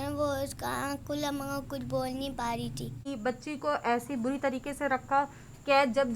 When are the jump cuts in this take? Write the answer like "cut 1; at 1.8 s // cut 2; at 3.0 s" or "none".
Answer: cut 1; at 3.1 s